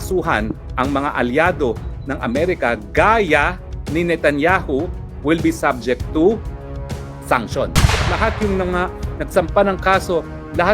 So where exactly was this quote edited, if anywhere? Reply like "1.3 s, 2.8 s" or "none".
8.0 s